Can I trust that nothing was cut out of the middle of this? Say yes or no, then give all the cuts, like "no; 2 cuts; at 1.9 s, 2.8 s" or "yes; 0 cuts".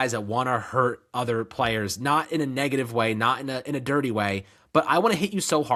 yes; 0 cuts